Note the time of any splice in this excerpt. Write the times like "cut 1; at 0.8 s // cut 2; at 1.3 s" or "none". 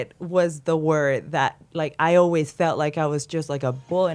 none